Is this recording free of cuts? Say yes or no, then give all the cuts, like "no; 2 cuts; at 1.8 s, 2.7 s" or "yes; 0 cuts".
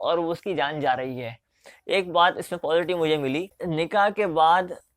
no; 1 cut; at 3.6 s